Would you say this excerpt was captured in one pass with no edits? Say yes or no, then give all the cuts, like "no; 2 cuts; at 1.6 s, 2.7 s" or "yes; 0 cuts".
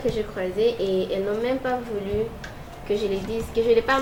yes; 0 cuts